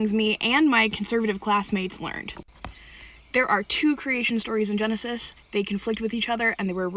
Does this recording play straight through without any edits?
yes; 0 cuts

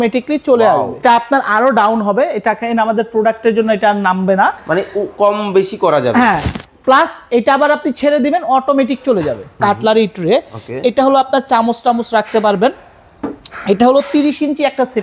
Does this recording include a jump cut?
yes; 2 cuts; at 1.0 s, 9.6 s

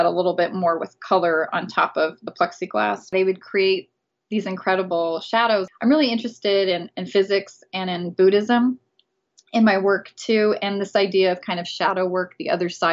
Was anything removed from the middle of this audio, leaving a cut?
yes; 1 cut; at 3.1 s

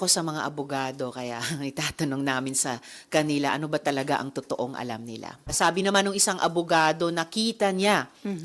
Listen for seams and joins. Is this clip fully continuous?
no; 1 cut; at 5.5 s

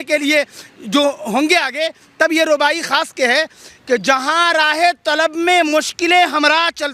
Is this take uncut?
yes; 0 cuts

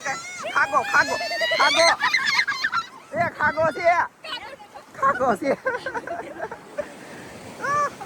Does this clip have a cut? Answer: no; 0 cuts

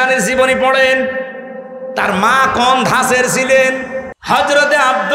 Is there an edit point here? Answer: yes; 1 cut; at 4.1 s

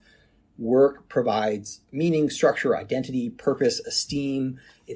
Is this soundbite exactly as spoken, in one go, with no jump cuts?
yes; 0 cuts

